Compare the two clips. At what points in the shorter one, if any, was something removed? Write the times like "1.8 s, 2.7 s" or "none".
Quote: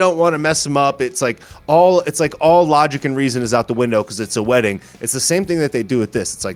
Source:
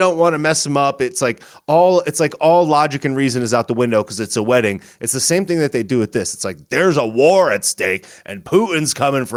none